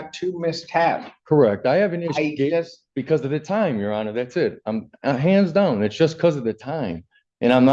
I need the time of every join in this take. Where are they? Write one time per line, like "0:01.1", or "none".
none